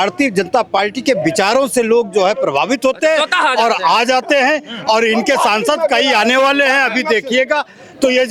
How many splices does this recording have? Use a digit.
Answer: 0